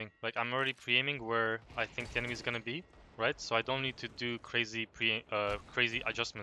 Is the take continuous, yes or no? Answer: yes